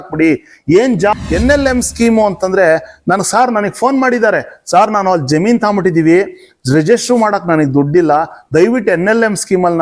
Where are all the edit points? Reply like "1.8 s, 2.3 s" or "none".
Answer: 1.2 s